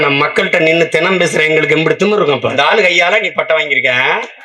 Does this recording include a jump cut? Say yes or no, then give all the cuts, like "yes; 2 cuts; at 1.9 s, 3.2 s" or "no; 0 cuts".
yes; 1 cut; at 2.5 s